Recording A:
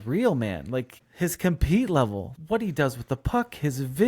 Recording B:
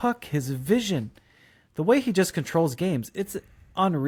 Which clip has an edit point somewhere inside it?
A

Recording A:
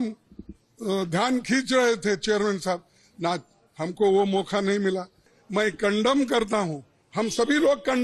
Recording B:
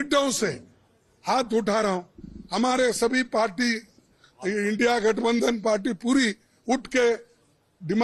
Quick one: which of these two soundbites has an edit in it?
A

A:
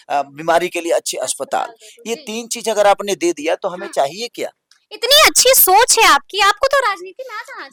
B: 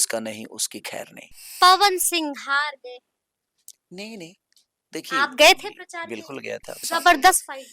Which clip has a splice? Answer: B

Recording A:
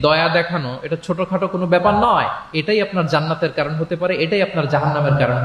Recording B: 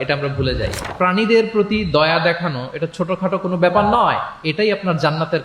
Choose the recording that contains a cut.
B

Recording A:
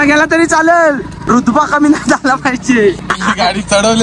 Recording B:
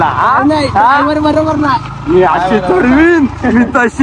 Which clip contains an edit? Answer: A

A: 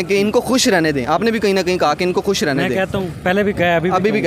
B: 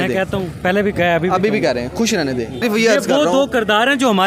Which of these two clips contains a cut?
B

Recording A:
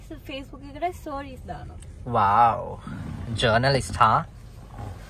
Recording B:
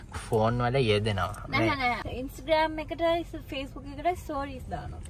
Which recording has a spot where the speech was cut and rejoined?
B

